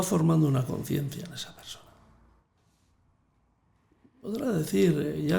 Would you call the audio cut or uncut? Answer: uncut